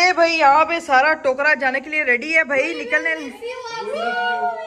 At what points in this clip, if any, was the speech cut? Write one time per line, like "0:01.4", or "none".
none